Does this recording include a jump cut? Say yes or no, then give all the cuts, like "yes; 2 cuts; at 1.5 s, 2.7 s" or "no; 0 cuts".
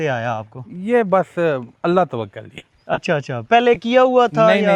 no; 0 cuts